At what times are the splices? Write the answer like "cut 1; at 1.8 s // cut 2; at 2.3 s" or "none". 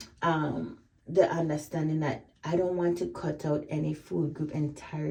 none